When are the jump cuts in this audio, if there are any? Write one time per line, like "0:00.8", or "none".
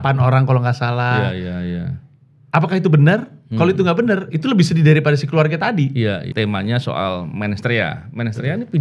0:06.3

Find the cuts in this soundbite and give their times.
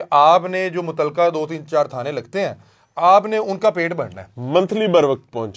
none

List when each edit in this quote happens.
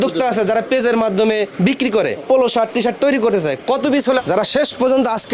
0:04.2

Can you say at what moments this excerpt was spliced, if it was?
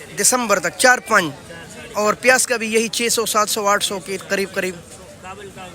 none

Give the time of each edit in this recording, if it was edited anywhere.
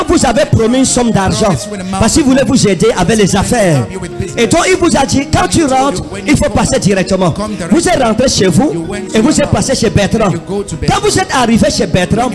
none

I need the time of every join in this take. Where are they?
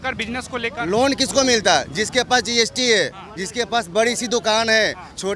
none

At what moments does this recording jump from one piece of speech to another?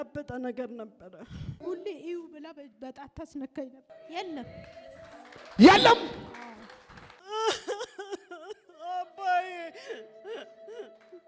0:03.9

